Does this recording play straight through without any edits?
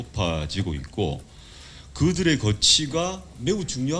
yes; 0 cuts

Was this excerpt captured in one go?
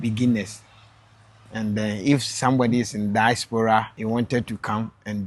no; 1 cut; at 3.9 s

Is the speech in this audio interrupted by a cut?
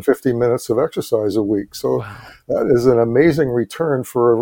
no; 0 cuts

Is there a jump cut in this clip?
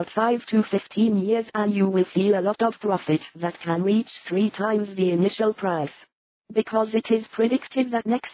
no; 0 cuts

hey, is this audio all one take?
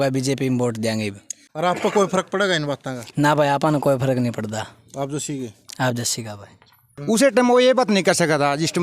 no; 2 cuts; at 1.6 s, 6.9 s

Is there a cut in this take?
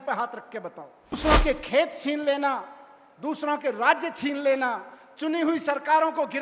yes; 1 cut; at 1.1 s

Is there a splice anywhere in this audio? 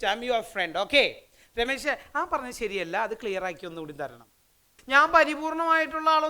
yes; 1 cut; at 4.7 s

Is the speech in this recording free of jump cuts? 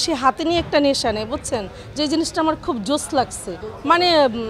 yes; 0 cuts

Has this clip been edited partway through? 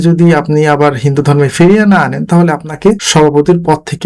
yes; 1 cut; at 3.0 s

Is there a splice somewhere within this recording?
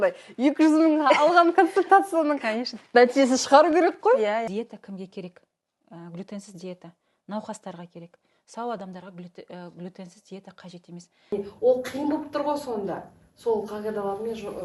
yes; 2 cuts; at 4.5 s, 11.3 s

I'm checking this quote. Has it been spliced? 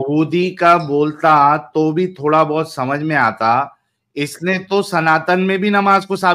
no; 0 cuts

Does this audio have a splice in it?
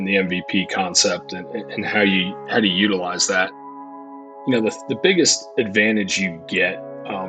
yes; 1 cut; at 3.8 s

